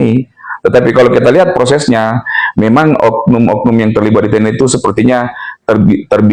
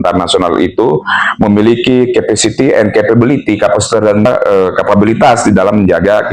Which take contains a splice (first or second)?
second